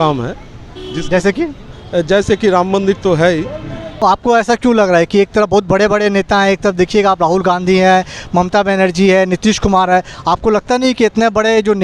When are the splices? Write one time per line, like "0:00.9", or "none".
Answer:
0:04.0

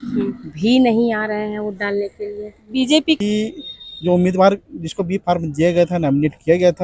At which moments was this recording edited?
0:03.2

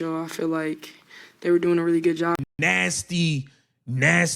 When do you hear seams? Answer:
0:02.4

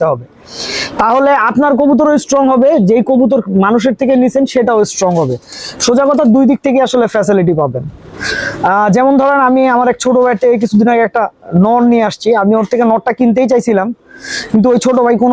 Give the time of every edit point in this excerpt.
none

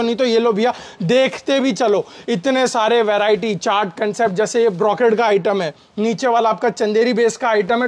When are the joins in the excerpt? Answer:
none

